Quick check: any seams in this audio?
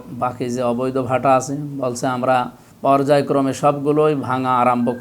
yes; 1 cut; at 2.6 s

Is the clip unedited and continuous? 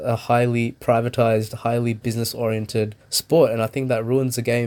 no; 1 cut; at 3.1 s

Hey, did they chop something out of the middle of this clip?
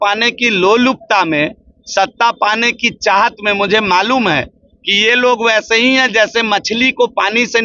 no; 0 cuts

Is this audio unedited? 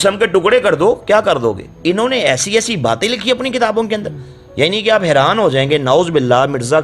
no; 1 cut; at 1.7 s

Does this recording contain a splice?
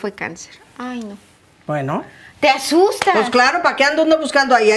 no; 0 cuts

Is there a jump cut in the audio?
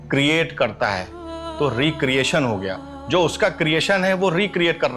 no; 0 cuts

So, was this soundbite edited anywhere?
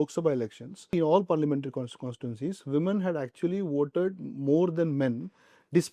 yes; 1 cut; at 0.9 s

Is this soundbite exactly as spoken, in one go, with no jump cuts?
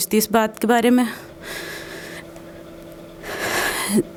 yes; 0 cuts

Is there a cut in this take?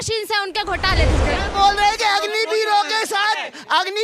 yes; 1 cut; at 1.4 s

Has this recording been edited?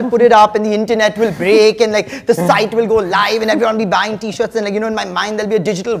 no; 0 cuts

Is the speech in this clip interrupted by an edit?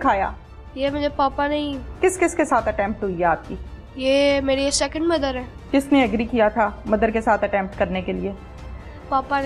yes; 2 cuts; at 1.9 s, 5.5 s

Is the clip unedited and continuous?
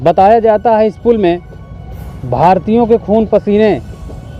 yes; 0 cuts

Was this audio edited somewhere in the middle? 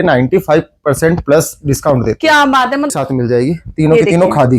yes; 1 cut; at 2.9 s

